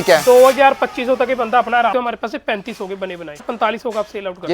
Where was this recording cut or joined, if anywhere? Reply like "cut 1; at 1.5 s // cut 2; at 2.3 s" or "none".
cut 1; at 1.9 s // cut 2; at 3.4 s

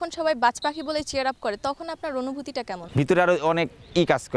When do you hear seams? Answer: cut 1; at 2.7 s

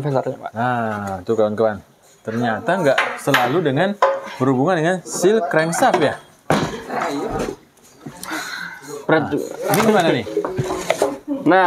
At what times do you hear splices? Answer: none

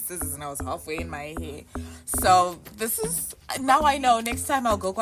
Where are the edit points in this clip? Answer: none

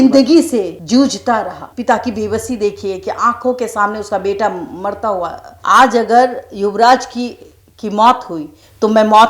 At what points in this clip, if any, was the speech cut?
cut 1; at 1.7 s // cut 2; at 5.5 s

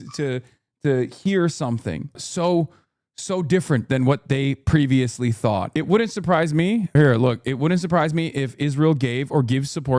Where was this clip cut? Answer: cut 1; at 2.2 s // cut 2; at 5.7 s // cut 3; at 6.9 s

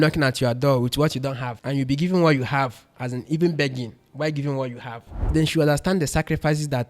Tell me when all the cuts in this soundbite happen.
cut 1; at 1.5 s // cut 2; at 5.2 s

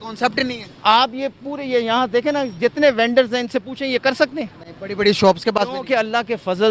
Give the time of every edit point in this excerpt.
none

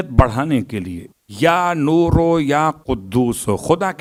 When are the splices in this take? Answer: none

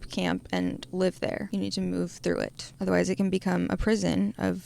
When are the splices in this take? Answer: cut 1; at 1.4 s // cut 2; at 2.6 s

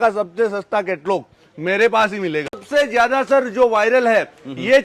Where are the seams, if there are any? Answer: cut 1; at 2.6 s

